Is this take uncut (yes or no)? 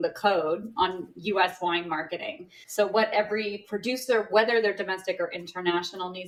yes